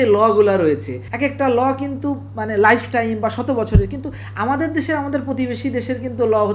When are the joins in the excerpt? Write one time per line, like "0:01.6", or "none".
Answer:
0:01.0